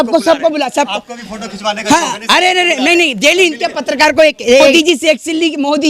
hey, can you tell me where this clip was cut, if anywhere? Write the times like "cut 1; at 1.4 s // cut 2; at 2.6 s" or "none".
cut 1; at 4.7 s